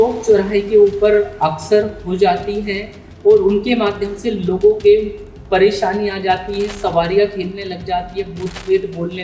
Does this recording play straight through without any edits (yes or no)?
yes